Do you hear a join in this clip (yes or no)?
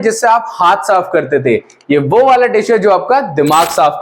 no